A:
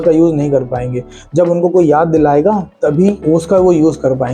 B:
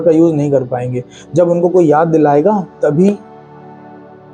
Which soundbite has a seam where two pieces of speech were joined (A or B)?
A